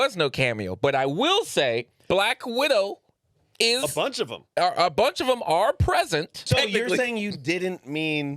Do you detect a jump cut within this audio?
yes; 2 cuts; at 2.0 s, 6.4 s

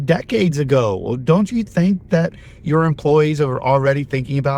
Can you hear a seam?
no; 0 cuts

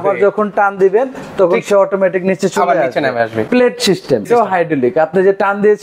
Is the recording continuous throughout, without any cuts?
no; 2 cuts; at 3.4 s, 4.2 s

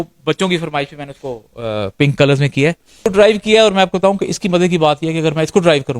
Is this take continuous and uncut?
no; 1 cut; at 2.9 s

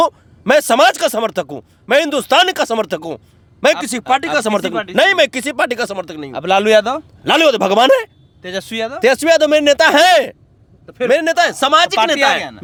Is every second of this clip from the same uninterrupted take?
yes; 0 cuts

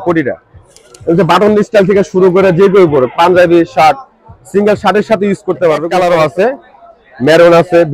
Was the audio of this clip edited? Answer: yes; 1 cut; at 5.9 s

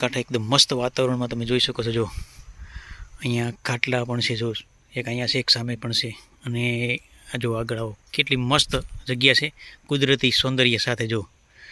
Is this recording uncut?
yes; 0 cuts

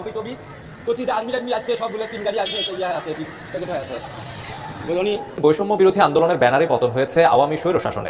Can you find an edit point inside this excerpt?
no; 0 cuts

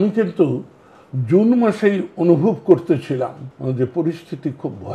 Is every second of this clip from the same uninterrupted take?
no; 1 cut; at 3.5 s

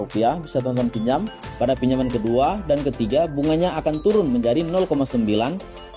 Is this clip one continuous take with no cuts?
no; 1 cut; at 1.4 s

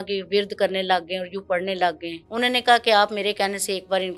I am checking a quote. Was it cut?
yes; 1 cut; at 2.1 s

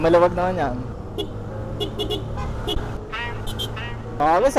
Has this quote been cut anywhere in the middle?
yes; 2 cuts; at 1.0 s, 3.0 s

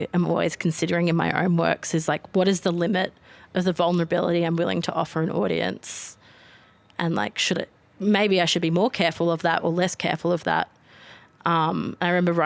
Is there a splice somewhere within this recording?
no; 0 cuts

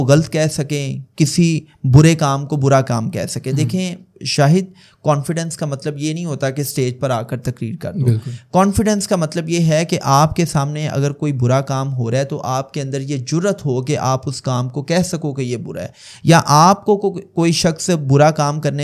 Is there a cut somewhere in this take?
no; 0 cuts

